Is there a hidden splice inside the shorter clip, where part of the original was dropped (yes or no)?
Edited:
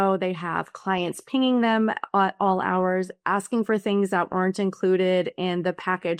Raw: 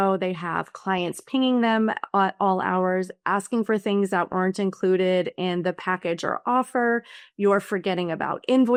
no